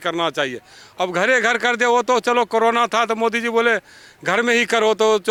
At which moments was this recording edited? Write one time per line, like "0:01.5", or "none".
none